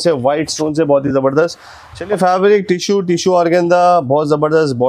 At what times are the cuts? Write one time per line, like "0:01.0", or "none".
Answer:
0:02.0